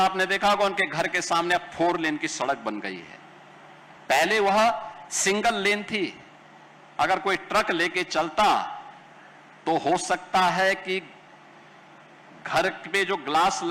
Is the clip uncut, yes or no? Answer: yes